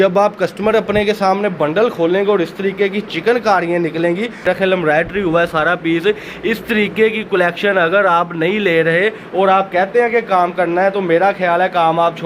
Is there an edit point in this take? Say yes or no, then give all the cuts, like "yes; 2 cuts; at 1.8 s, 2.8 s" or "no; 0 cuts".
yes; 1 cut; at 4.4 s